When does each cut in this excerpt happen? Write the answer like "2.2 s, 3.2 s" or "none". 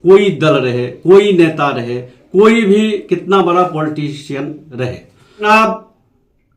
5.5 s